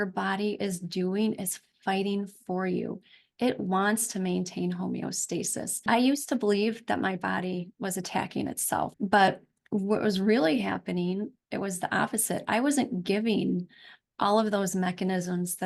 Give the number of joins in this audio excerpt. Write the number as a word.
two